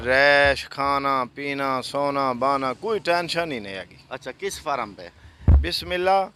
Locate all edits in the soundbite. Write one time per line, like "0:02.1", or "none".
none

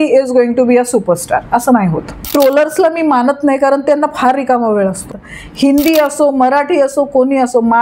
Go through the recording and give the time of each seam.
0:02.1
0:05.1

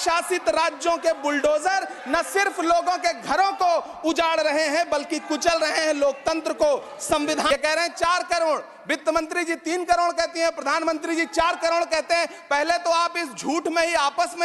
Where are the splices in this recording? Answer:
0:07.5

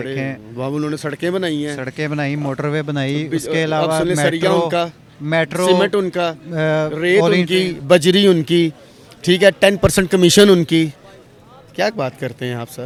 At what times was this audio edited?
none

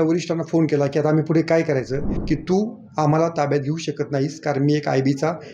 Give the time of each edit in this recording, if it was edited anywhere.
0:02.1

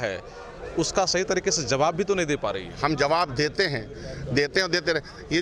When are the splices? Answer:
none

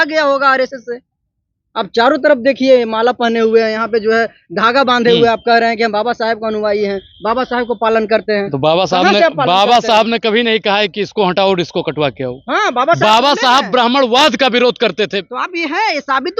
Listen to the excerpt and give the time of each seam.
none

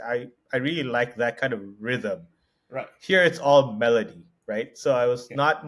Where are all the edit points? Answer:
none

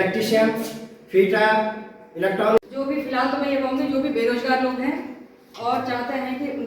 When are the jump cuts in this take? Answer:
0:02.6

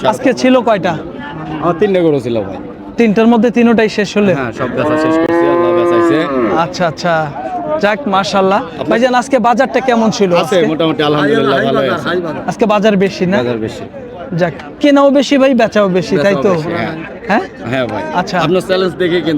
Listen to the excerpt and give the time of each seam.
none

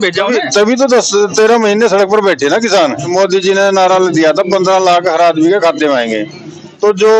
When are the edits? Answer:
0:03.1

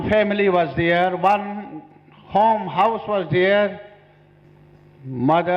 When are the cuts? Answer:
0:04.4

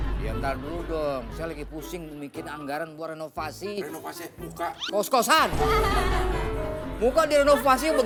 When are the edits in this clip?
none

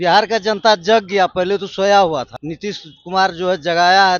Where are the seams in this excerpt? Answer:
0:02.4

